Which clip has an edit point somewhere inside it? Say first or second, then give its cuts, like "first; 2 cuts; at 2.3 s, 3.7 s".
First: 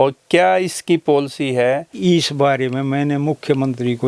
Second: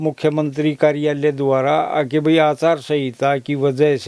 first; 1 cut; at 1.9 s